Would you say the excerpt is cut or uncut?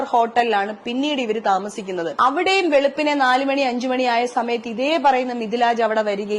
cut